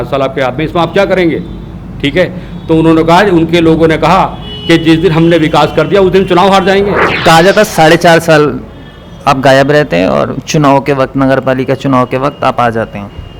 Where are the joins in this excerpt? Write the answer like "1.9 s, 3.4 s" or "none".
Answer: 7.1 s

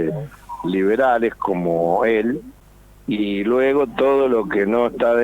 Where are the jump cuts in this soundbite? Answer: 2.5 s

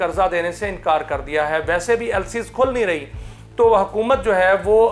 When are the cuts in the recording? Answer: none

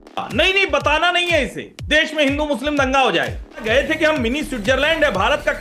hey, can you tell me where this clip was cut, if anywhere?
3.6 s

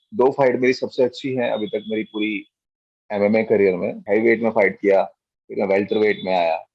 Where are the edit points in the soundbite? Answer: 4.0 s

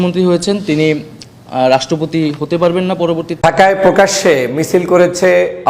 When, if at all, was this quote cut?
3.3 s

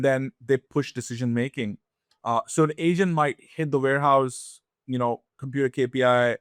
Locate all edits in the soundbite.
none

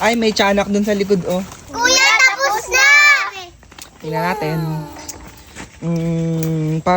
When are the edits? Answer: 1.6 s

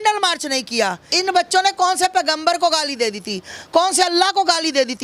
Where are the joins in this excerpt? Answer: 1.1 s

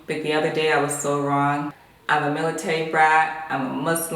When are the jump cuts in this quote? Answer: 1.7 s

